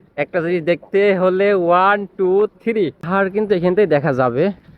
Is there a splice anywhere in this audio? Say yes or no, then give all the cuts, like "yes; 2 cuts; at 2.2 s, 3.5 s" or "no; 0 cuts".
yes; 1 cut; at 3.0 s